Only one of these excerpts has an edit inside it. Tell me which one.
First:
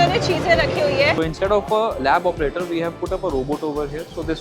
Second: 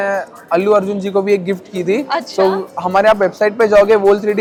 first; 1 cut; at 1.2 s

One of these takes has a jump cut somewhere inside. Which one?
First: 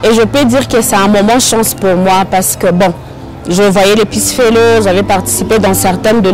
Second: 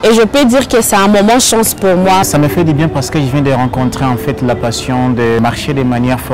second; 2 cuts; at 2.3 s, 5.4 s

